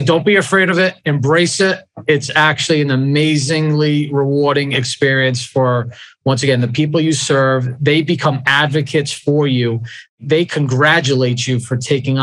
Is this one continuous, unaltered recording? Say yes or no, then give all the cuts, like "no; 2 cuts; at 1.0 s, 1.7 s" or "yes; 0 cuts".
no; 1 cut; at 10.1 s